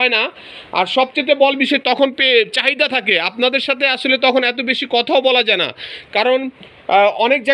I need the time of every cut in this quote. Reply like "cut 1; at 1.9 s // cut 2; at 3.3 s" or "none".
none